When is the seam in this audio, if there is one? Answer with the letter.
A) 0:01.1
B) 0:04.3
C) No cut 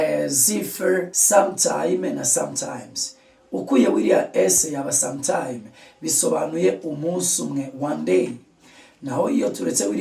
A